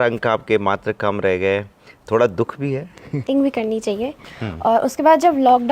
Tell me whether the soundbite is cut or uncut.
cut